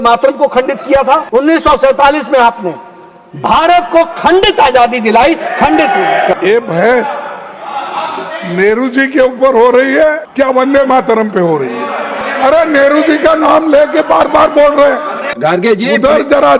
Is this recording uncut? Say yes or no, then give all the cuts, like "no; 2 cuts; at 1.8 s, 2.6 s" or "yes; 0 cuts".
no; 5 cuts; at 1.2 s, 6.4 s, 10.2 s, 12.2 s, 15.2 s